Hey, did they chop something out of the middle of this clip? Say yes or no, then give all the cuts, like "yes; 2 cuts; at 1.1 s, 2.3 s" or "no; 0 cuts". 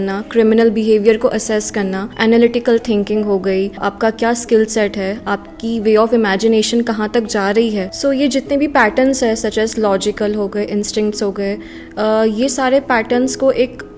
yes; 3 cuts; at 2.0 s, 3.9 s, 7.9 s